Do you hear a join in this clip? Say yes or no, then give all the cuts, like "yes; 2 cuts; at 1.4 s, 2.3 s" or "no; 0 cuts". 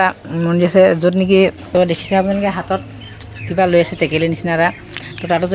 no; 0 cuts